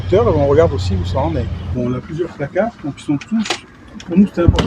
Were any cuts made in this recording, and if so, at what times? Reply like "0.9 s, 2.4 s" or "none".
1.8 s